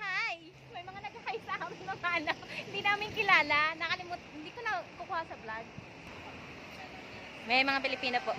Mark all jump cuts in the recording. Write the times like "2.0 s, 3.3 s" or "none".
6.0 s